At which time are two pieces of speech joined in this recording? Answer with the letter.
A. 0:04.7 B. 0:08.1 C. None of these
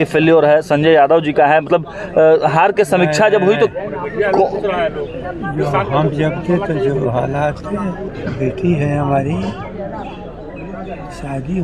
B